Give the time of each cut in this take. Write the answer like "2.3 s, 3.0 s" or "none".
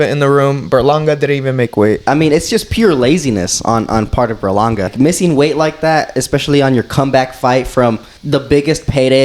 2.0 s, 4.9 s, 8.1 s